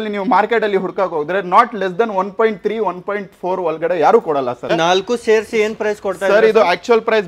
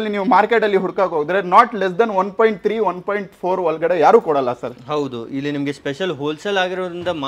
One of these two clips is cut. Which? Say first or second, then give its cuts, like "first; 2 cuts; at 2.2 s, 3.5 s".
first; 1 cut; at 4.7 s